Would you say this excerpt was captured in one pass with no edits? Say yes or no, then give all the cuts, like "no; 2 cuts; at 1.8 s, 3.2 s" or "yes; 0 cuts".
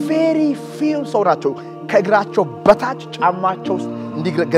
yes; 0 cuts